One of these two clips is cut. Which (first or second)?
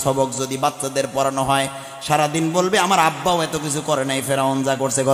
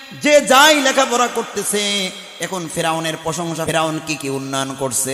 second